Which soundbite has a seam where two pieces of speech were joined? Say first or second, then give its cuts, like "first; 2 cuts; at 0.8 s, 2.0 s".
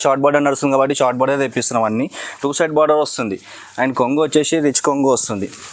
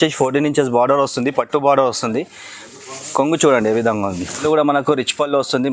second; 1 cut; at 4.4 s